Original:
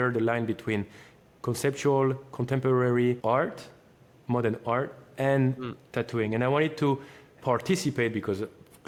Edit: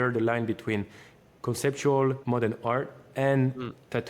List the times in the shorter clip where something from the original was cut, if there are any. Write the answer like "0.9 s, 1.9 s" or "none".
2.2 s